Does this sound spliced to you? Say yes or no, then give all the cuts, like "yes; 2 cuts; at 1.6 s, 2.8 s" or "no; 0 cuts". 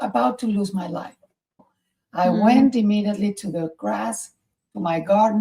yes; 1 cut; at 1.7 s